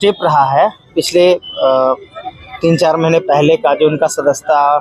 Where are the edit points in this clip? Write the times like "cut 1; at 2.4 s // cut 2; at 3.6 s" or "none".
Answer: none